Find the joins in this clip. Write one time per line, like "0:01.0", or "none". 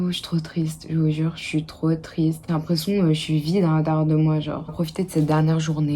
0:02.4
0:04.7